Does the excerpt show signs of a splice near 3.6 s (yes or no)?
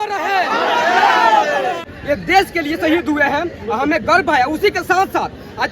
no